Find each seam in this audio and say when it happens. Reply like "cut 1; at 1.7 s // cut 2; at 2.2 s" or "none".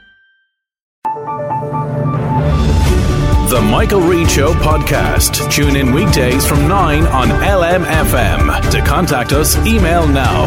cut 1; at 0.9 s